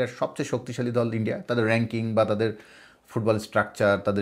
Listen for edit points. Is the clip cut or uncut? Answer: uncut